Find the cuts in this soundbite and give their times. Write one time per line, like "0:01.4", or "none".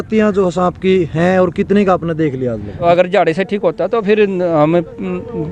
0:02.7